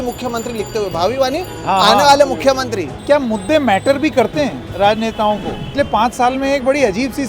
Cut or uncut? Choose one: cut